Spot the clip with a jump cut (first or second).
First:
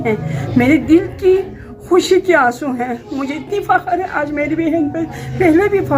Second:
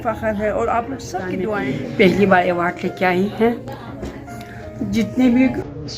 second